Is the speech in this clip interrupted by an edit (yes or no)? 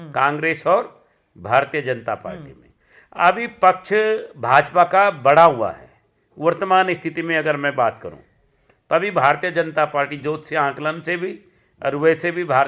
no